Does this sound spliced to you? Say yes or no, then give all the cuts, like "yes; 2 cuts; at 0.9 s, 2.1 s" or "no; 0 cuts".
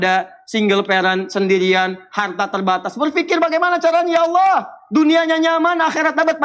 no; 0 cuts